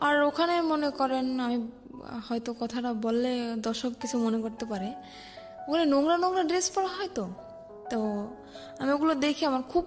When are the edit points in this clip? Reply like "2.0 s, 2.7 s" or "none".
none